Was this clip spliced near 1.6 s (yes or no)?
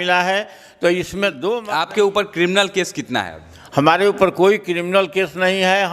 yes